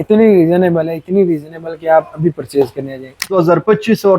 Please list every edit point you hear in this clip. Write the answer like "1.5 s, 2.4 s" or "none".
3.3 s